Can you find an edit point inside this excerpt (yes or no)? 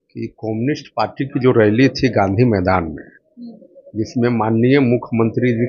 no